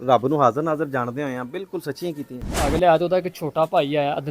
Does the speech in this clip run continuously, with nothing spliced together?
no; 1 cut; at 2.7 s

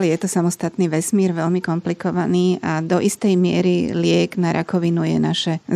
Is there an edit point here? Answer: no; 0 cuts

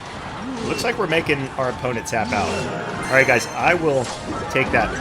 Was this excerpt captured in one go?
no; 1 cut; at 3.0 s

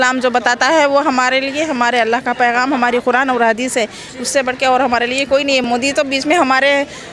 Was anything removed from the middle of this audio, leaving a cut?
yes; 1 cut; at 5.6 s

